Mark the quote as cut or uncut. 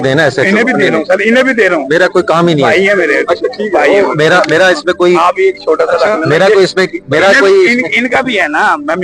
uncut